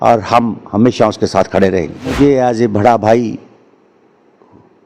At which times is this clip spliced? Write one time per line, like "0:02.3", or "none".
0:02.1